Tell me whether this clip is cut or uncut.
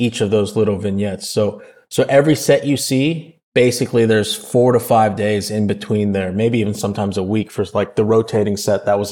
uncut